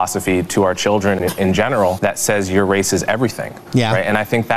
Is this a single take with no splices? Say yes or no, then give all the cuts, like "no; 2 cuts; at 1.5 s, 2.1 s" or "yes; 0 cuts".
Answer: no; 2 cuts; at 1.2 s, 2.0 s